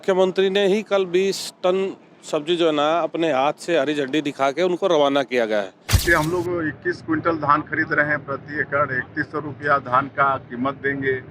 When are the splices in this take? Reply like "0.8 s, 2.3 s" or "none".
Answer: 5.9 s